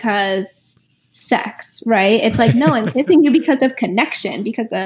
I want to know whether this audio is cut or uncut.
uncut